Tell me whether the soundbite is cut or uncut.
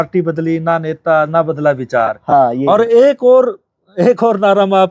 uncut